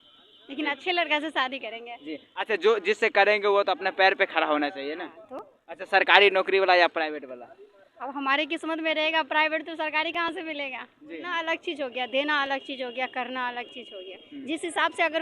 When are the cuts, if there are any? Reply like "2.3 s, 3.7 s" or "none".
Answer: 11.3 s

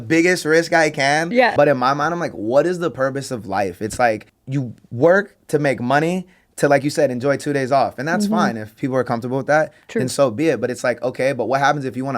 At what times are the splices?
1.5 s, 4.3 s

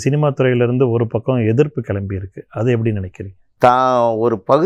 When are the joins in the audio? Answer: 3.4 s

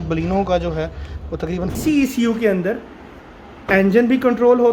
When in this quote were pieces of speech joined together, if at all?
1.7 s

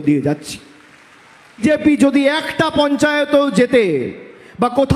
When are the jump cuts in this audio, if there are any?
1.6 s

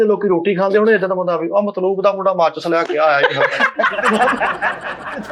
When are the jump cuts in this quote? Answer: none

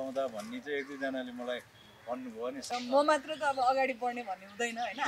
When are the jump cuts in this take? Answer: 2.7 s

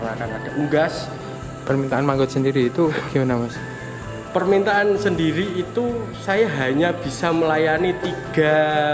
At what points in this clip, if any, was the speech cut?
1.4 s

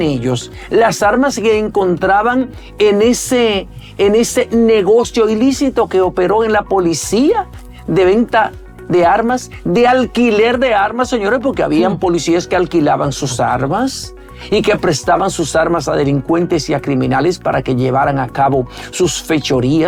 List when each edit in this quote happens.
none

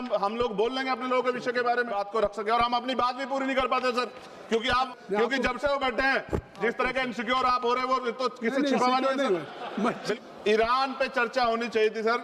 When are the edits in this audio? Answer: 2.0 s, 4.9 s, 10.1 s

